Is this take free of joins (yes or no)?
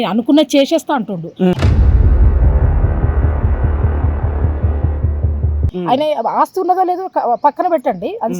no